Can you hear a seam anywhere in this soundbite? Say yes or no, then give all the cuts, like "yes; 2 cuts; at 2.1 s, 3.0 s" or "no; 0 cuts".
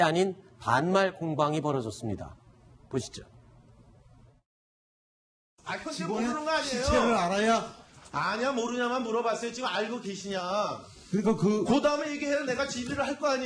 no; 0 cuts